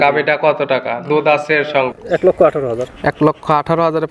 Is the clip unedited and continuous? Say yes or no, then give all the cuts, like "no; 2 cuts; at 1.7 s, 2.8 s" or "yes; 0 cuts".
no; 1 cut; at 2.0 s